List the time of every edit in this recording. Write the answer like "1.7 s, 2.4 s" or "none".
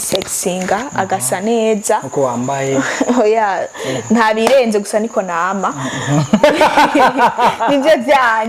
none